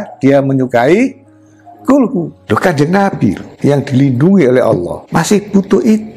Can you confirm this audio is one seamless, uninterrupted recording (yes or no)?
no